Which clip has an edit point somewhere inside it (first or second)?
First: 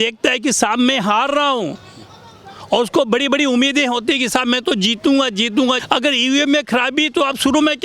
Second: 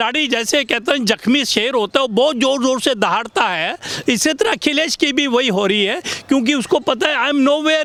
first